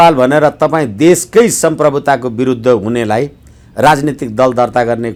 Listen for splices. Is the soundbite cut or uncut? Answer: uncut